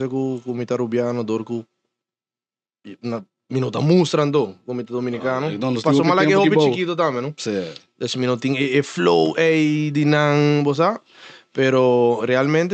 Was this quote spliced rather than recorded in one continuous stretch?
no; 0 cuts

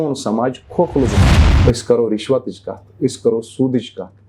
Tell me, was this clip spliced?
yes; 1 cut; at 1.3 s

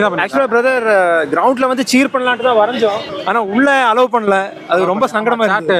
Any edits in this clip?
yes; 1 cut; at 3.1 s

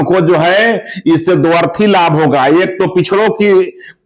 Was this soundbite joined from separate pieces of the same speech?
no; 0 cuts

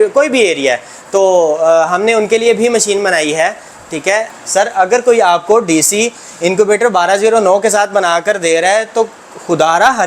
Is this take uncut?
no; 1 cut; at 4.4 s

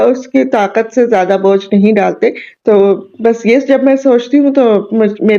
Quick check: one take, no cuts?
yes; 0 cuts

